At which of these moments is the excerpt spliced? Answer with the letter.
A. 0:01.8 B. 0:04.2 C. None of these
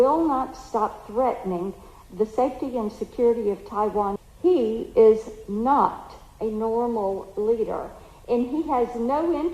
B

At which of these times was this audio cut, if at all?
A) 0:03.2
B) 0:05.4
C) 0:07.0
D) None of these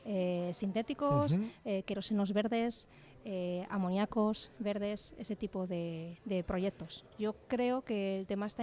C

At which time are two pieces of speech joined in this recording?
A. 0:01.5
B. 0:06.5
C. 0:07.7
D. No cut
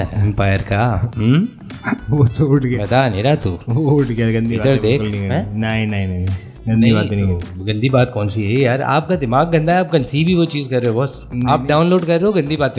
D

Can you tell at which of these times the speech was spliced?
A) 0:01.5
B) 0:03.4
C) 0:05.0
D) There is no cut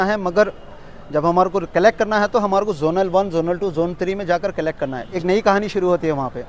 C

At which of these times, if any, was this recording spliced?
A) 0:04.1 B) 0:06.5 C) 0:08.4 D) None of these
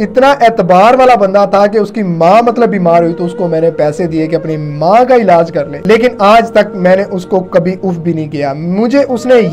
D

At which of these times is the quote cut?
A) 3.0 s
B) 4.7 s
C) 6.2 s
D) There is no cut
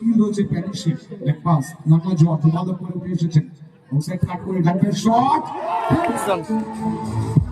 C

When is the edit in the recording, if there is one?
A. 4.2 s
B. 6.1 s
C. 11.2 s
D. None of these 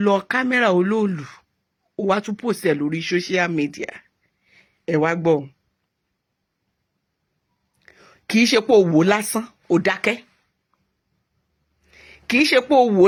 D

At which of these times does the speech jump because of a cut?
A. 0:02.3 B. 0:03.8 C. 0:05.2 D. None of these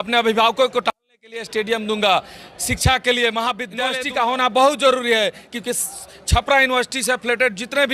B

